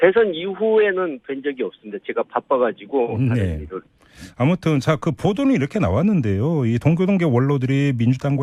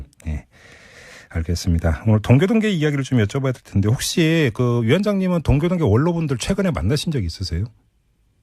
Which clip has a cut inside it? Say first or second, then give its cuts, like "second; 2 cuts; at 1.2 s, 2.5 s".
second; 1 cut; at 2.2 s